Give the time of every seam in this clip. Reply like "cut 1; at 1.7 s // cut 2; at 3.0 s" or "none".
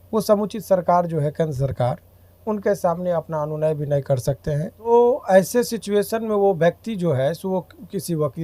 cut 1; at 4.9 s